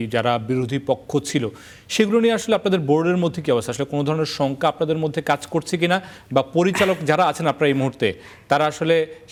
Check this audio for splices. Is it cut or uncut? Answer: uncut